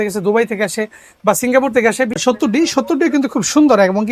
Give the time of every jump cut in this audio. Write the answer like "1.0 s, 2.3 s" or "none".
2.1 s